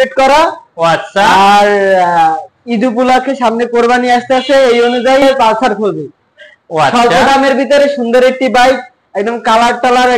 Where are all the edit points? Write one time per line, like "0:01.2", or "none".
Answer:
0:05.2